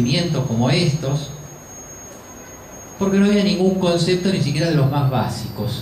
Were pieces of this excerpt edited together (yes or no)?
no